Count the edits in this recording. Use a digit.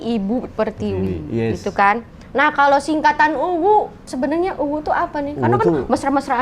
1